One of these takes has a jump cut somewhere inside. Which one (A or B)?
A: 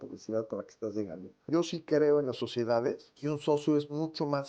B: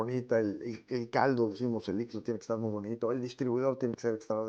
A